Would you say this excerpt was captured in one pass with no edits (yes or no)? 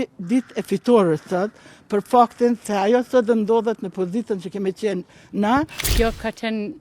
no